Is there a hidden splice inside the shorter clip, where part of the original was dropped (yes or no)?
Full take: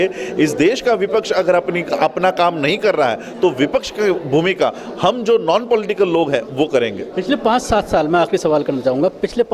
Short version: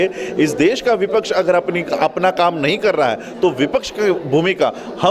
no